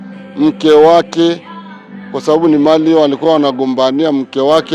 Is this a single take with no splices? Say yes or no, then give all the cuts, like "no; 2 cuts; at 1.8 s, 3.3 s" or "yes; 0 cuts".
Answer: yes; 0 cuts